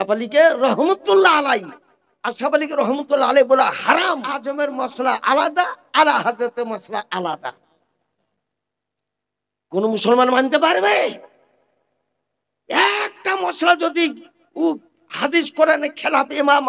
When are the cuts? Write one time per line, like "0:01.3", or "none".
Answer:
0:04.4